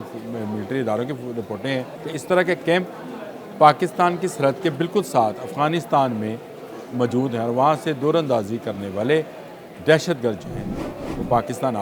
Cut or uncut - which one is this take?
cut